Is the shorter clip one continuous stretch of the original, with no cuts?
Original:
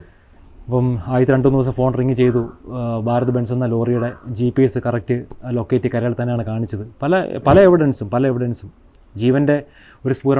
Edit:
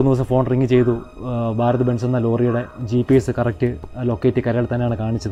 yes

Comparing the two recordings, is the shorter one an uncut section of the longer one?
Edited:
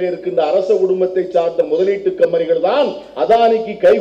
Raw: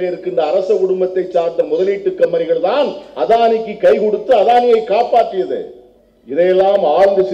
yes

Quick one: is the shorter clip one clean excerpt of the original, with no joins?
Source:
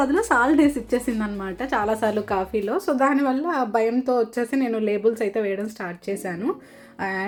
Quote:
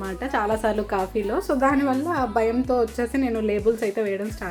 yes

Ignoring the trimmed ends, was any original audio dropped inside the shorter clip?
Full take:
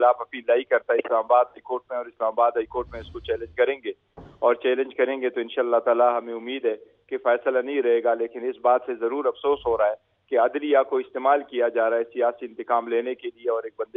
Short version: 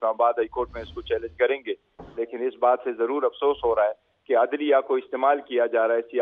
yes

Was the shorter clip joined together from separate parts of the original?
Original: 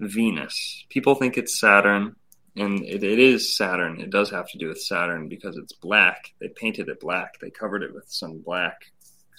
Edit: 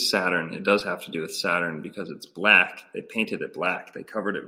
no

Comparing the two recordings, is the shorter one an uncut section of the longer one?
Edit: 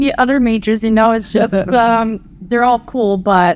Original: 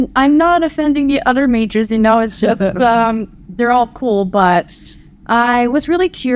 yes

